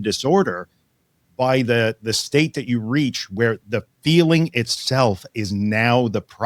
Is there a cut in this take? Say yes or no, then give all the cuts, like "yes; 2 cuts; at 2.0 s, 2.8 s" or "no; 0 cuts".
no; 0 cuts